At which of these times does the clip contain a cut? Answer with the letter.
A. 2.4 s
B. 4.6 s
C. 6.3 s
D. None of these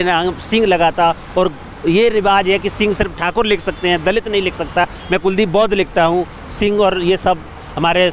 D